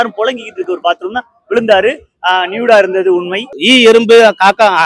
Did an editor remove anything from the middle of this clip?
yes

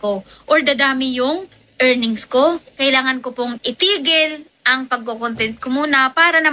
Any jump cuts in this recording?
yes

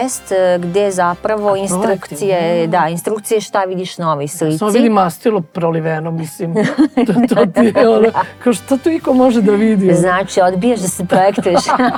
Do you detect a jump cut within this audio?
no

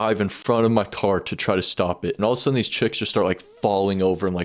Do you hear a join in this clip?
yes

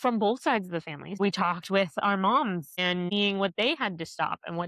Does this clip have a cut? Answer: yes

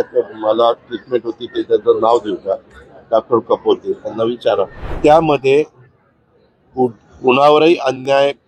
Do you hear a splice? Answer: yes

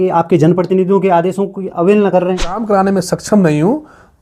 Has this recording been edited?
yes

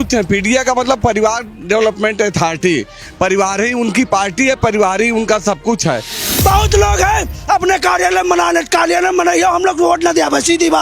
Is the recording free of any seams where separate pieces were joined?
no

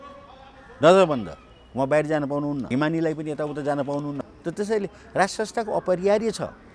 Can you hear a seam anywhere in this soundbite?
yes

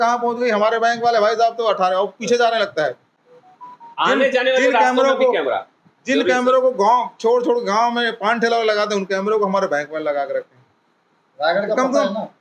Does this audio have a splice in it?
no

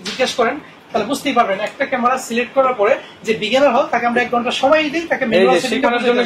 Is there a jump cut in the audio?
no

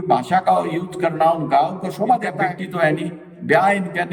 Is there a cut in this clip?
yes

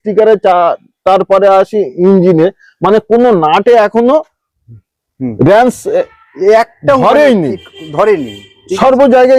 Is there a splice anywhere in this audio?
no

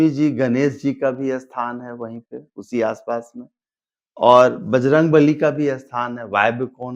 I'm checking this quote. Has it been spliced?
no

